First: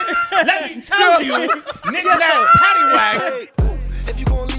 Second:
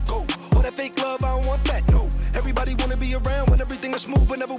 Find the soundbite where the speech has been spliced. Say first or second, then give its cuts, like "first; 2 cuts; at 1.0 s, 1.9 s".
first; 1 cut; at 3.2 s